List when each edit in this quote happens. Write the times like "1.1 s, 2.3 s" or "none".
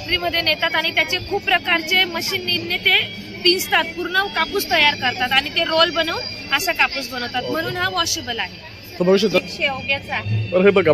9.4 s

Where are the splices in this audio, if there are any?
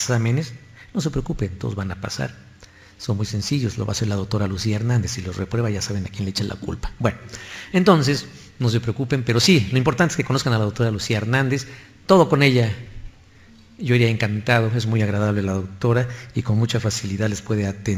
none

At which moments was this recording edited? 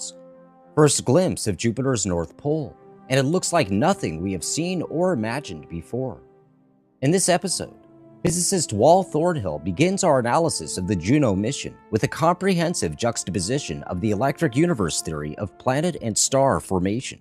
none

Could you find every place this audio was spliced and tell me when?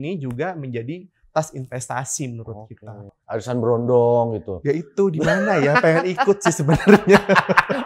3.1 s

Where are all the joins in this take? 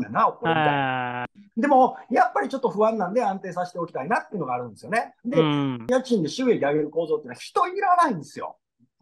1.4 s, 5.9 s

